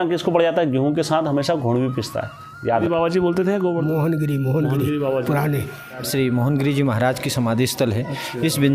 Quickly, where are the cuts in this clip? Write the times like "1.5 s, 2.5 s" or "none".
2.8 s, 6.1 s